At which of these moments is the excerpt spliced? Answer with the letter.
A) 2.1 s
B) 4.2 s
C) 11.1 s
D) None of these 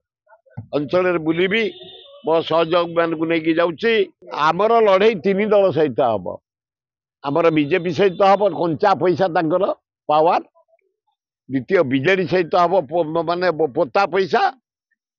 B